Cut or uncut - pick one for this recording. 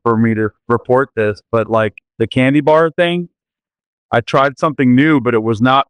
uncut